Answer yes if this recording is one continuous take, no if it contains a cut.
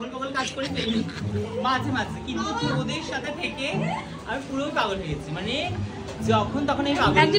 yes